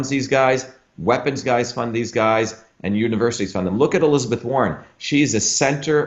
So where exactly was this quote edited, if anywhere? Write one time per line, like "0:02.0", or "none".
none